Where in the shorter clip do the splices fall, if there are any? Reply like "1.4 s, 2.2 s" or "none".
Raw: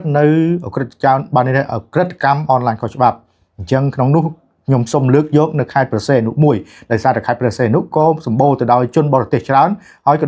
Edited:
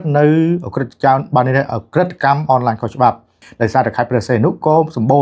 3.4 s